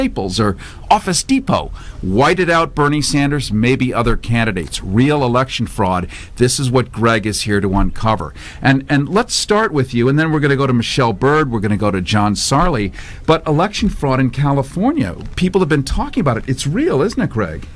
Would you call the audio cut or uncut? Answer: cut